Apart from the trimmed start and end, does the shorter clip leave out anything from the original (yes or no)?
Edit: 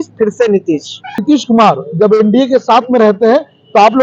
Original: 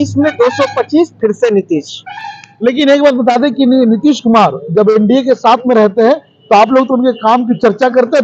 yes